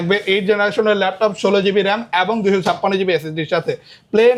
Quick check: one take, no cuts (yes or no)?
yes